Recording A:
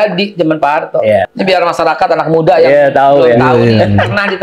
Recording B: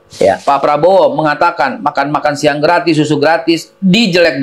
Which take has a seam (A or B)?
A